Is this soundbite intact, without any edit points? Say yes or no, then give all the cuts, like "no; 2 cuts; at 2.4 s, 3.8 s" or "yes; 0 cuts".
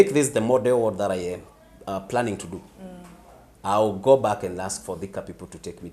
yes; 0 cuts